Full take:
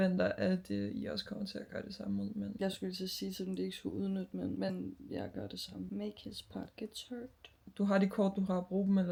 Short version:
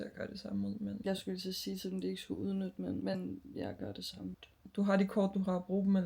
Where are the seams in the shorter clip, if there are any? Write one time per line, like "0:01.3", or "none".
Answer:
0:04.3